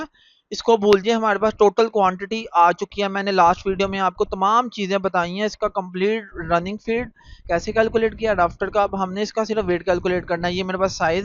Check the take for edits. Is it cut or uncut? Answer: uncut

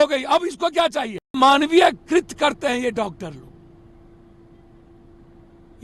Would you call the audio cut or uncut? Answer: cut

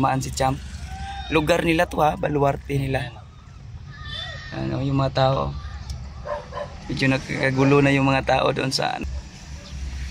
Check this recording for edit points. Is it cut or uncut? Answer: cut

